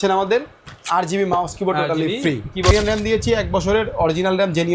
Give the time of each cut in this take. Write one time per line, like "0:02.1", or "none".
0:02.7